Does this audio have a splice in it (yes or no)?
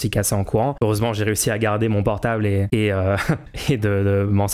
yes